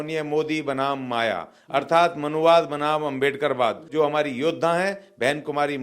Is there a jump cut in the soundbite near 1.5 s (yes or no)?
no